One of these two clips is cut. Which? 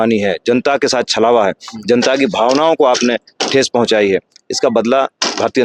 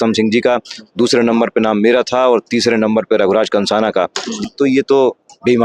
second; 1 cut; at 4.3 s

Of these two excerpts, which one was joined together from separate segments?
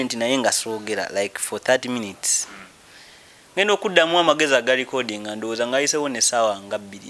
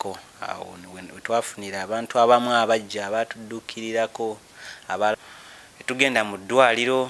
second; 1 cut; at 5.1 s

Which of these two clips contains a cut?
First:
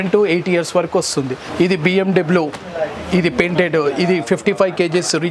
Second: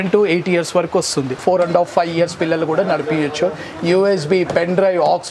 second; 1 cut; at 1.4 s

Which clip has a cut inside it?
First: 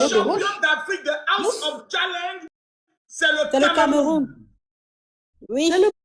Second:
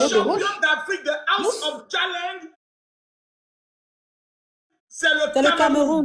first; 1 cut; at 3.3 s

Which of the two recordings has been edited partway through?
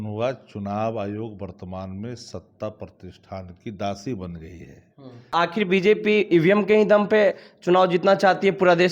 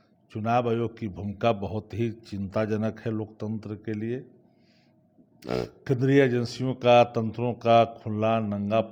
first; 1 cut; at 5.3 s

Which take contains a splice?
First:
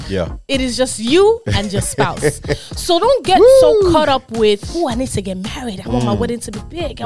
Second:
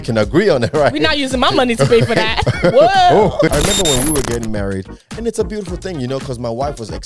second; 1 cut; at 3.5 s

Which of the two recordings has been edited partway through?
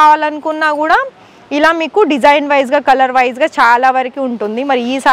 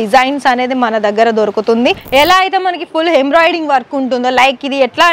second; 1 cut; at 2.0 s

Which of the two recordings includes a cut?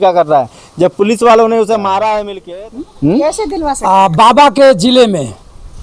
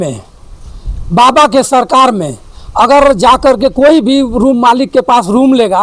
first; 1 cut; at 2.4 s

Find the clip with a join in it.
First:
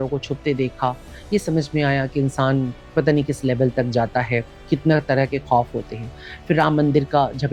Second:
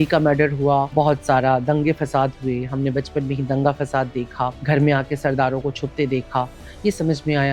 second; 2 cuts; at 0.9 s, 4.6 s

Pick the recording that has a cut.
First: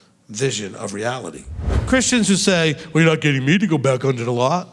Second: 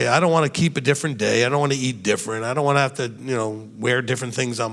first; 1 cut; at 1.7 s

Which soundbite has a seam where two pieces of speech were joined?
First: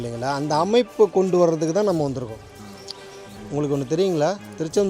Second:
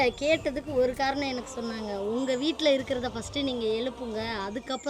first; 1 cut; at 3.4 s

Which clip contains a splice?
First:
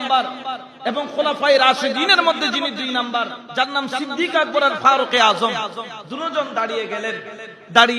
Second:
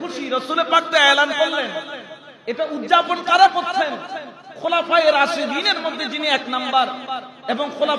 first; 1 cut; at 3.4 s

